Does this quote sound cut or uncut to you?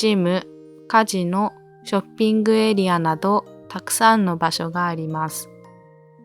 cut